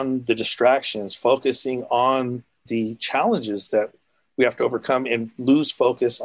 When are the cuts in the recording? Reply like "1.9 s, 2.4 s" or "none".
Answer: 2.6 s